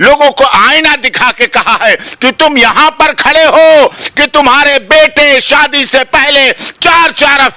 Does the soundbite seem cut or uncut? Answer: uncut